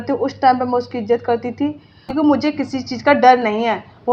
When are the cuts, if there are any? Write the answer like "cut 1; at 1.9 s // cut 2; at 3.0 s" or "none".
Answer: cut 1; at 2.1 s